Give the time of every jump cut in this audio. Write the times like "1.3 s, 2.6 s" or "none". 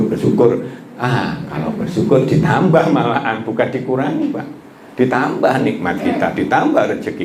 none